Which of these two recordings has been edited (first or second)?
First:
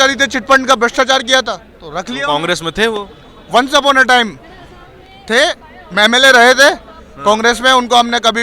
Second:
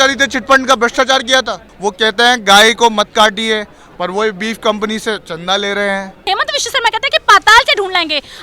second